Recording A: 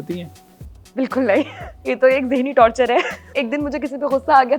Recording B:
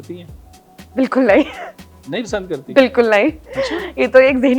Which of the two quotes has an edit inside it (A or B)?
A